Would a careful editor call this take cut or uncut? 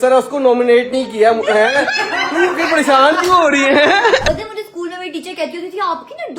cut